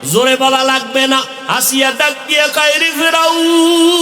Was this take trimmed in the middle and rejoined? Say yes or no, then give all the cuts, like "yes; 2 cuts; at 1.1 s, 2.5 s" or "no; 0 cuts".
yes; 1 cut; at 1.4 s